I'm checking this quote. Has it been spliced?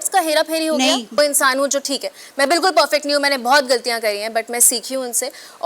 yes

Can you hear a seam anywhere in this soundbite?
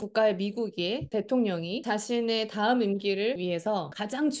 yes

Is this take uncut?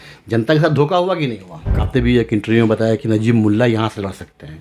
no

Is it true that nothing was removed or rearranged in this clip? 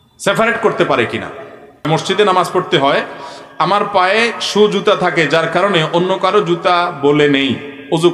no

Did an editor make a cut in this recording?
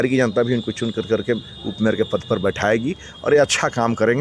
no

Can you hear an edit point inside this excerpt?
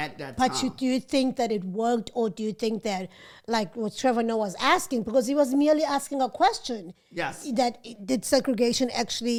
no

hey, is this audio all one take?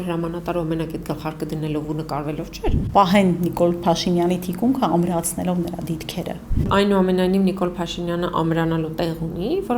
no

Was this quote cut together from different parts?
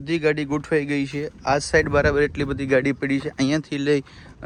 no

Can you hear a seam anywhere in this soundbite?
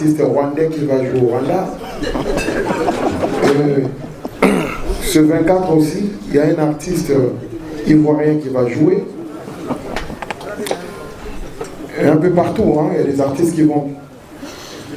no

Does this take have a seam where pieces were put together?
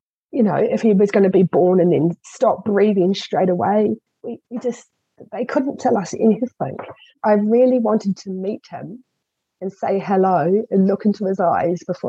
yes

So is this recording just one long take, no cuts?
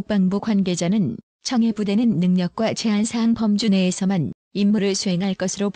no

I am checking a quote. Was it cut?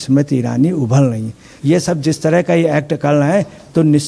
yes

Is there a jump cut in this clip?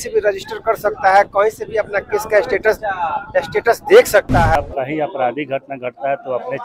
yes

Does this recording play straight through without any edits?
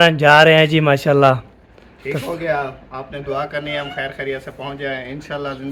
yes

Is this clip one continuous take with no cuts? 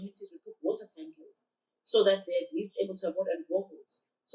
yes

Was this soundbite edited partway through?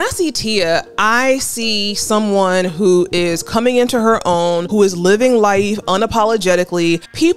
no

